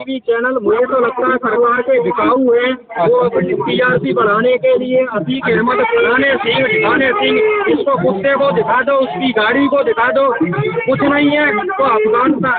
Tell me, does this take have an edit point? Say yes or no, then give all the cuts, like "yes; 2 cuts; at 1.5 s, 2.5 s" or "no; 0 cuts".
no; 0 cuts